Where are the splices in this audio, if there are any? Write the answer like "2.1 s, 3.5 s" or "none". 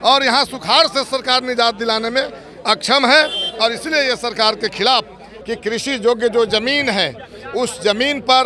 5.3 s